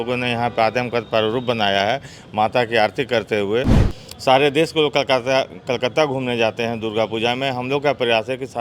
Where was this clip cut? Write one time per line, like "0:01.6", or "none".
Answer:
0:03.9